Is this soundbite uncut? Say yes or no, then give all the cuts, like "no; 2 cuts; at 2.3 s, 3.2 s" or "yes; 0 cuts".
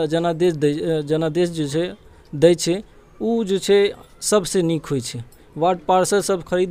yes; 0 cuts